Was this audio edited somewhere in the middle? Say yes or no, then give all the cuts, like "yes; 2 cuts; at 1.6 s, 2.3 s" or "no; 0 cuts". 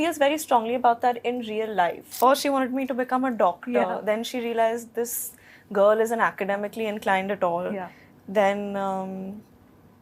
yes; 1 cut; at 2.1 s